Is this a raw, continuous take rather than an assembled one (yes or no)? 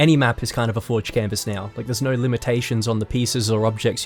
yes